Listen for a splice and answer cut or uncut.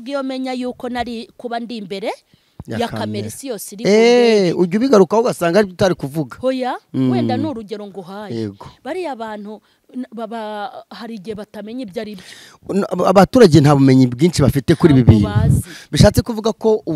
uncut